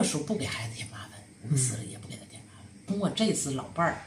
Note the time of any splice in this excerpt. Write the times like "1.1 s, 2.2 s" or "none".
2.8 s